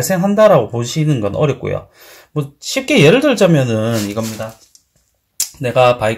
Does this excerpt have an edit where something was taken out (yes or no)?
no